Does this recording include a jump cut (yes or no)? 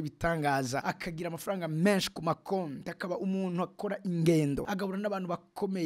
yes